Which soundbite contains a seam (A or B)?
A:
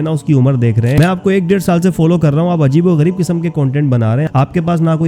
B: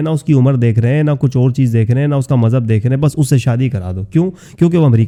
A